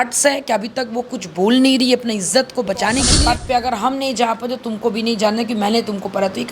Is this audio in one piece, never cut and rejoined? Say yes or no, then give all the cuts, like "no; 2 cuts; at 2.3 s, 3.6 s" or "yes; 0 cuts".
no; 1 cut; at 3.2 s